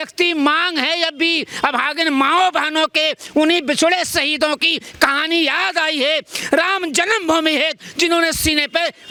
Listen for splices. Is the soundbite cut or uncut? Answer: uncut